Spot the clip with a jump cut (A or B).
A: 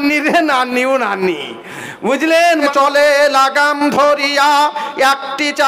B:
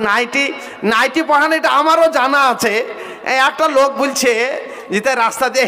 A